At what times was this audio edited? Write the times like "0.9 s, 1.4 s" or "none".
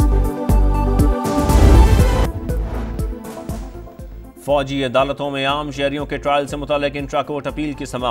2.3 s

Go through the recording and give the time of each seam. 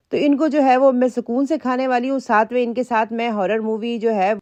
none

